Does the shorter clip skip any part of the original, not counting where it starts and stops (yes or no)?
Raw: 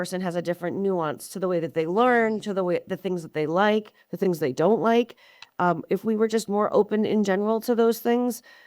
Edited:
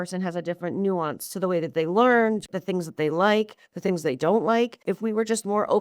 yes